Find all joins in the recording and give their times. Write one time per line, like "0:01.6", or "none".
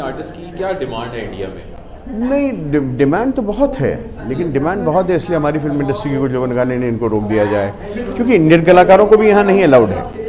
none